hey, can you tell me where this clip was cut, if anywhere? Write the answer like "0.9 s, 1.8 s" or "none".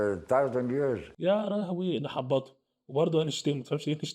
1.1 s